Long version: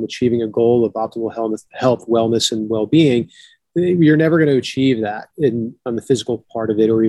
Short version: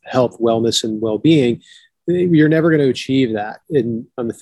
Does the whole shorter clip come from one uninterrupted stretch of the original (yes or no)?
yes